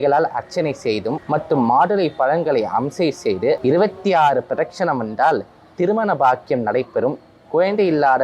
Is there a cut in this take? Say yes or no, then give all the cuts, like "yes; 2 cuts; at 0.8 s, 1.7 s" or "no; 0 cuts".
yes; 2 cuts; at 1.2 s, 3.6 s